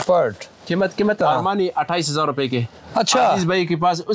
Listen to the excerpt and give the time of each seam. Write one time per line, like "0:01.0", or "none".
0:01.2